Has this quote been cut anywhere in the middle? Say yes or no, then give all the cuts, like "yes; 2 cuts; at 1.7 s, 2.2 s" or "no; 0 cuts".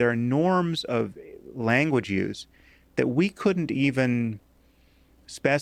no; 0 cuts